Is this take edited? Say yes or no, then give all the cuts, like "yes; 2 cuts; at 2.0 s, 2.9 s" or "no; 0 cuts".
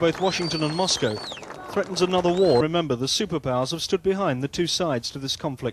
no; 0 cuts